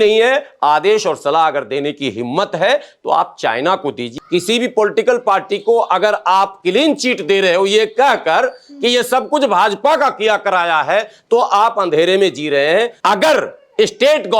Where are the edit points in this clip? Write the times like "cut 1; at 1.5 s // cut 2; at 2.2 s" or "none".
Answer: cut 1; at 4.1 s // cut 2; at 12.9 s